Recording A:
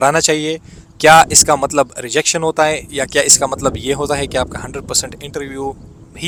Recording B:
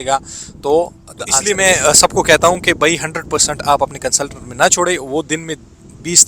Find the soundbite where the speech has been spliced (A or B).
B